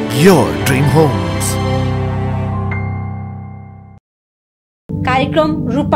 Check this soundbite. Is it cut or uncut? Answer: cut